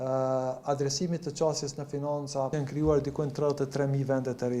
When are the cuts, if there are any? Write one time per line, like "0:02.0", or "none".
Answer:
0:02.5

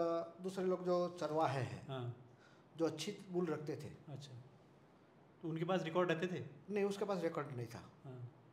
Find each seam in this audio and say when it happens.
none

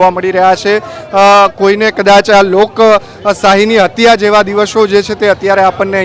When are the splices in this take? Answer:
none

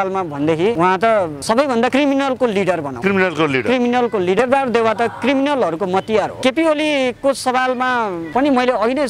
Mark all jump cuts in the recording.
0:00.8
0:01.8
0:02.9
0:04.4
0:06.3
0:08.2

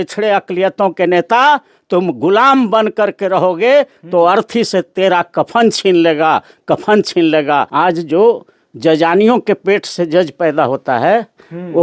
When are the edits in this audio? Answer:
0:07.7

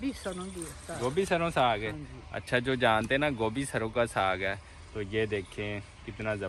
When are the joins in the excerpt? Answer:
none

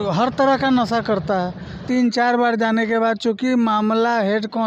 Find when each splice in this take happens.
0:01.8

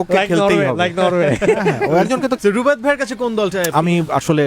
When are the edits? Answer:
0:02.4

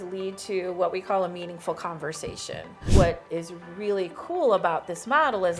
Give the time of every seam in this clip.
0:02.8

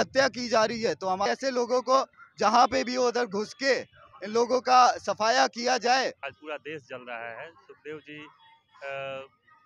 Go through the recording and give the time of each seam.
0:01.3
0:06.3

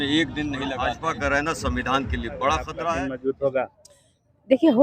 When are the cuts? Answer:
0:00.9
0:02.7

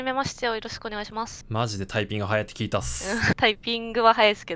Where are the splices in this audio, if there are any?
0:01.4
0:03.3

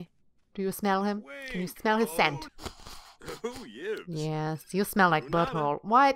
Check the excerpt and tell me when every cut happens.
0:02.4

